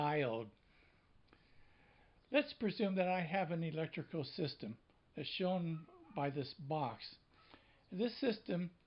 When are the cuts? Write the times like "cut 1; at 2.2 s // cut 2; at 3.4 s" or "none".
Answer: cut 1; at 7.2 s